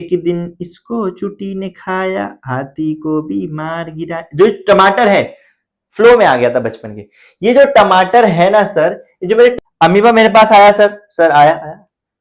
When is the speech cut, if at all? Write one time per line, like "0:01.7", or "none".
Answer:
0:09.5